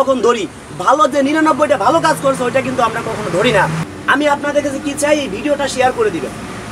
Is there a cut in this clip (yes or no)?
yes